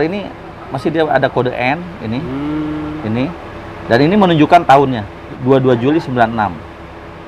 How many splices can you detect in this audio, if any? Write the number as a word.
one